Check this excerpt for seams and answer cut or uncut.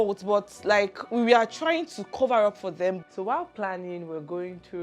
cut